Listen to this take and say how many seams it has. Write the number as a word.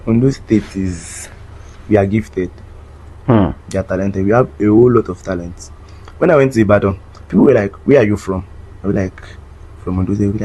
zero